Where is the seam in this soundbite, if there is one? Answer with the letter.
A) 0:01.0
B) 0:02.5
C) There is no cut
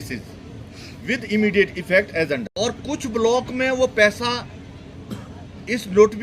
B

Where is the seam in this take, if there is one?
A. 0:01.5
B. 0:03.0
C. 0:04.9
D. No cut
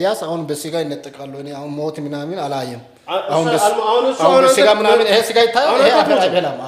D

